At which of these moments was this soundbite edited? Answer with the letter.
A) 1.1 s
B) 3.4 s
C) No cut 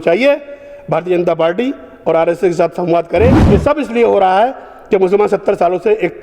B